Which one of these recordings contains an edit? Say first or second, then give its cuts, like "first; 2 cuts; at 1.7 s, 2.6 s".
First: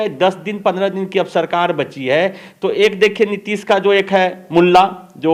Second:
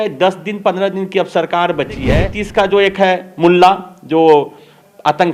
second; 1 cut; at 2.3 s